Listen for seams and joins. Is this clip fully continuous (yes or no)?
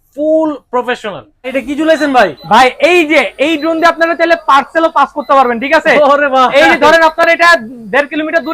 no